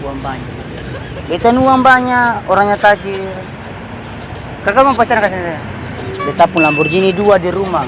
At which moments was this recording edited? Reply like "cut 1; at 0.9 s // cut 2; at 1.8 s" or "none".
cut 1; at 6.2 s